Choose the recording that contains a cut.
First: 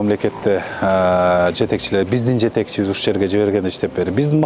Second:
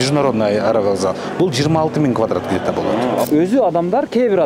second; 1 cut; at 3.3 s

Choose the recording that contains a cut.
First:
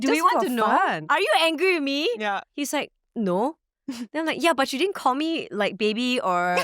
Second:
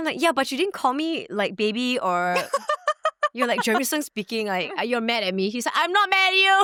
first; 2 cuts; at 1.0 s, 2.5 s

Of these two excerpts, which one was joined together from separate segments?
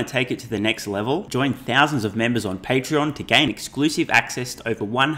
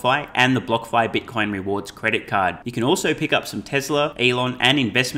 second; 1 cut; at 4.1 s

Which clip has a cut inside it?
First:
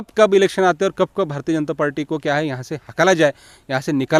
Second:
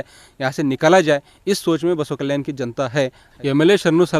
second; 1 cut; at 3.2 s

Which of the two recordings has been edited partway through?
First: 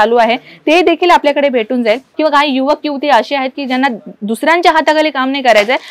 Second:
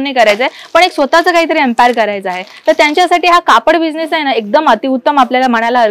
first; 1 cut; at 2.1 s

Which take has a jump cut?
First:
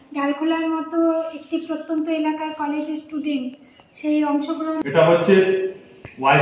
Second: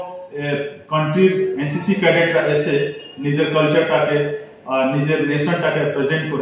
first; 1 cut; at 4.8 s

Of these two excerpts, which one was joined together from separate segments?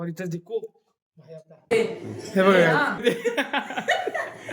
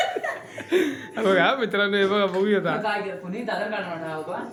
first; 2 cuts; at 1.7 s, 3.0 s

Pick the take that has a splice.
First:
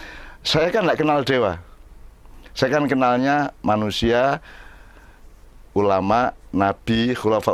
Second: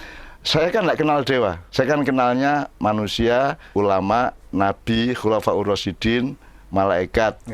second; 2 cuts; at 1.6 s, 3.6 s

